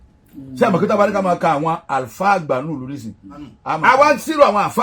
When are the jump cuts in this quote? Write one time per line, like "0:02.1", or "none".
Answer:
0:03.8

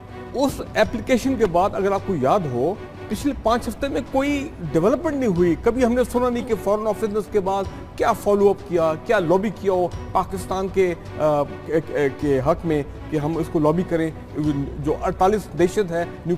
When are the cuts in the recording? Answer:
0:13.2

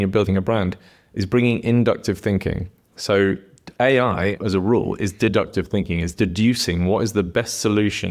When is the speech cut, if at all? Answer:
0:04.4
0:06.1

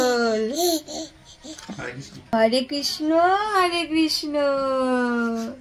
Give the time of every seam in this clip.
none

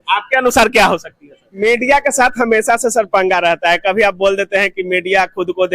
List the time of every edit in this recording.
0:01.4

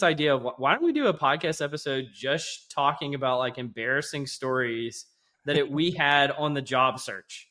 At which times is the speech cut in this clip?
none

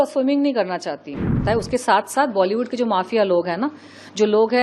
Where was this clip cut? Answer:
0:01.4

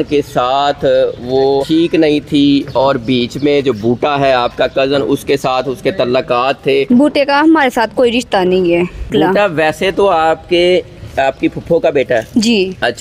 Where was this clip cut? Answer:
0:01.6
0:06.9
0:09.1

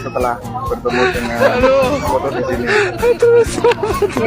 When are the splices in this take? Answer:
none

